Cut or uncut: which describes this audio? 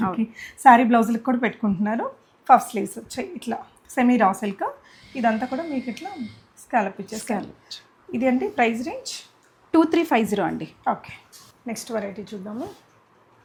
uncut